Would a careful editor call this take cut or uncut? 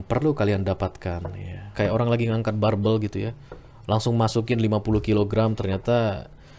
cut